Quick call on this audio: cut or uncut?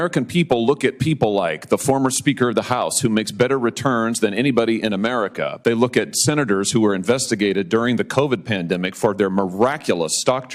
uncut